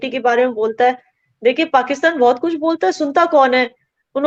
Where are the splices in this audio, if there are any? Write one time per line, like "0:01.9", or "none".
none